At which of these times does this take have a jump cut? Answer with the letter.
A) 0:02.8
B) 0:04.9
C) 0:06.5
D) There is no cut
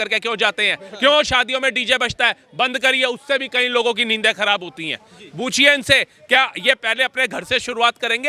D